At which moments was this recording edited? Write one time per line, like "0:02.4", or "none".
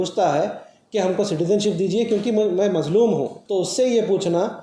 0:03.4